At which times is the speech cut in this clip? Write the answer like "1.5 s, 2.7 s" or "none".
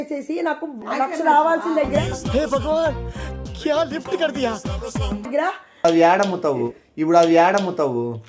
5.8 s